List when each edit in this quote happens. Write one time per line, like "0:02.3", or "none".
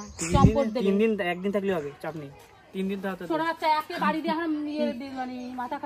0:02.6